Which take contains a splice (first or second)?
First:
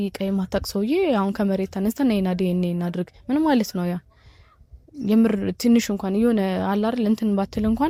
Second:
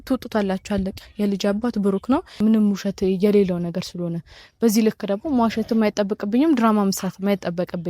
second